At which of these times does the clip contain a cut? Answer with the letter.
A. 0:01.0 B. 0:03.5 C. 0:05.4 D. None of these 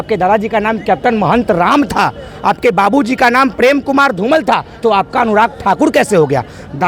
D